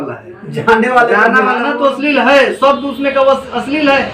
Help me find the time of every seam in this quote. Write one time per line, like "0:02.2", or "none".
0:01.7